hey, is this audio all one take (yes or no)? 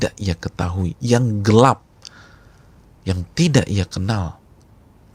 yes